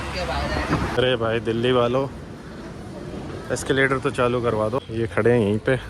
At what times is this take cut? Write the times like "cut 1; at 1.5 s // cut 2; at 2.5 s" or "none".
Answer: cut 1; at 0.9 s // cut 2; at 4.9 s